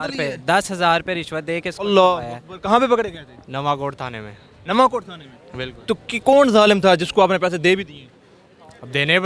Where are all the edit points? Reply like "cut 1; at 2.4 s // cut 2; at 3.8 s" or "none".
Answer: none